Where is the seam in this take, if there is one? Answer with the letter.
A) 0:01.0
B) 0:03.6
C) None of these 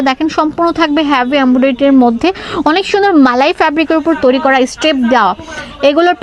C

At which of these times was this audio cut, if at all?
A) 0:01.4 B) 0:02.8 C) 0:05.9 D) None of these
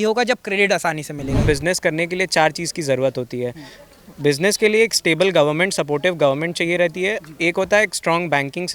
A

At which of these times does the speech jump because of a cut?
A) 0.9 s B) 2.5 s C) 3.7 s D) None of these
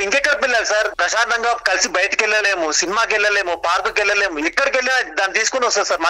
A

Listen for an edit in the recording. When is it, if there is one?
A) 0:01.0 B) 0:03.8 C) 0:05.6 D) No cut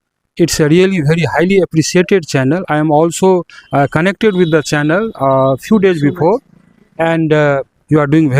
D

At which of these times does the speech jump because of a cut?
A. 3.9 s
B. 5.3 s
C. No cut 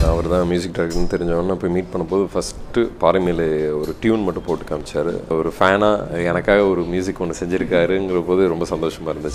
B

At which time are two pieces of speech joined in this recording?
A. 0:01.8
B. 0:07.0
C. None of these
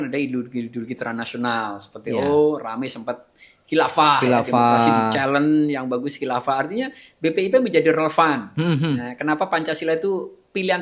C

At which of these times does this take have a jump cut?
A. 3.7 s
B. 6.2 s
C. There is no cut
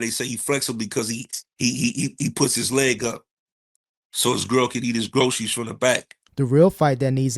B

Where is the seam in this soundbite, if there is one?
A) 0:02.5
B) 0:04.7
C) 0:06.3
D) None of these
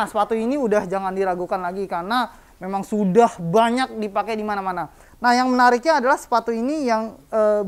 D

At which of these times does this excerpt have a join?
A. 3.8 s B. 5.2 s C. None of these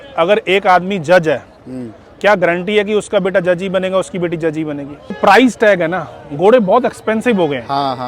B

